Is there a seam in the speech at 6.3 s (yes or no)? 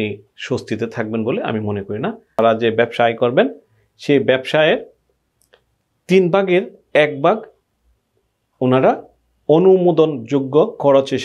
no